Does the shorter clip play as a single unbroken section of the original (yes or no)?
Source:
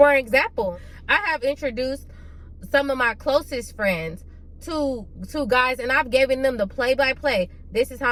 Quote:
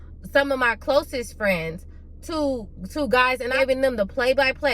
no